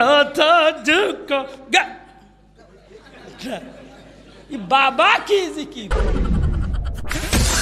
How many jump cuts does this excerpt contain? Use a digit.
1